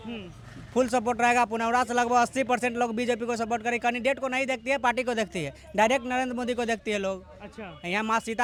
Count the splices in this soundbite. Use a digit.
0